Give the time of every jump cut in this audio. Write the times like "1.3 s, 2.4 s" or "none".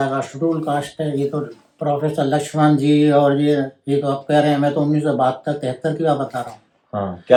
none